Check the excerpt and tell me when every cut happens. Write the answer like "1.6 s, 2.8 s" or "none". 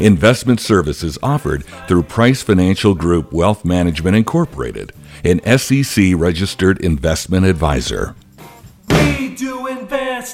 8.7 s